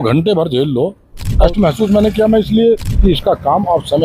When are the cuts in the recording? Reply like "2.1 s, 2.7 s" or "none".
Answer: 1.5 s, 2.9 s